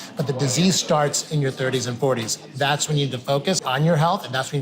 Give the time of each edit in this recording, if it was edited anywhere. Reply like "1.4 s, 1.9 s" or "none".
2.4 s, 3.6 s